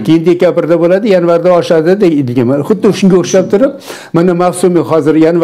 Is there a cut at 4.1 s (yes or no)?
no